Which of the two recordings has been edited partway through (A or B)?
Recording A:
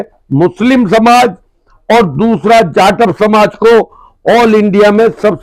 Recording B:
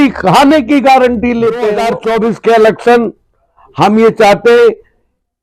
B